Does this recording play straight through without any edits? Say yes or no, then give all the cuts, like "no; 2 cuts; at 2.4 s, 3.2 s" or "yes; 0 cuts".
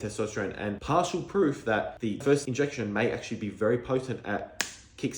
no; 1 cut; at 2.3 s